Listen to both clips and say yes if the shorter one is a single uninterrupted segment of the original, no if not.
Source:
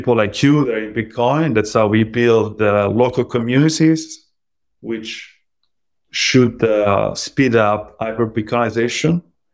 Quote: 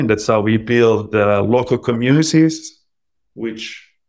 yes